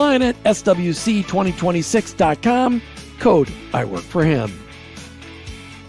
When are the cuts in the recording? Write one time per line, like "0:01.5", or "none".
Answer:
0:04.6